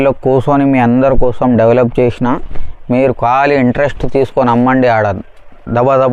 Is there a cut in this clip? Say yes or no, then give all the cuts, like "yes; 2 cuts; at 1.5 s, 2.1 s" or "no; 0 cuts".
no; 0 cuts